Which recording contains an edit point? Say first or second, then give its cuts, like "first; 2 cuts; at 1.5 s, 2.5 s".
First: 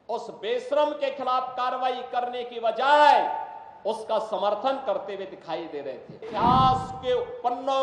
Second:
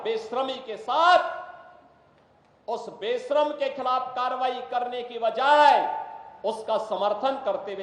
first; 1 cut; at 6.3 s